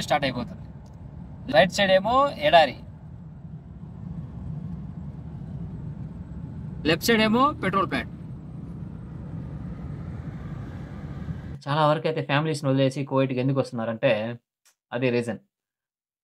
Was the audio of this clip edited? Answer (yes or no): yes